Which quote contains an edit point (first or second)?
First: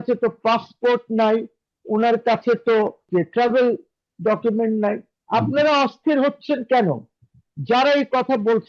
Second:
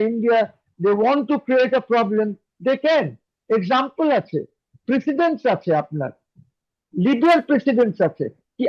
first